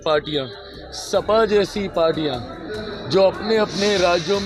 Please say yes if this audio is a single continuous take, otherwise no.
yes